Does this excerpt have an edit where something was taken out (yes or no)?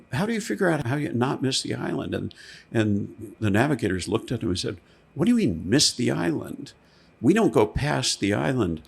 yes